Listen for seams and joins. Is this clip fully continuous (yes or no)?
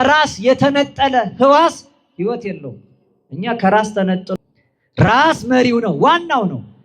no